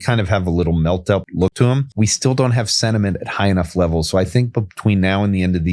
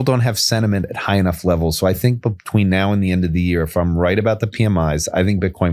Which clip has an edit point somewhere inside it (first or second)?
first